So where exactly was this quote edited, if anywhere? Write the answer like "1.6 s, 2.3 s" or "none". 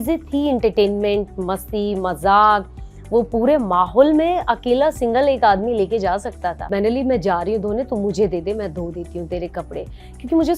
6.6 s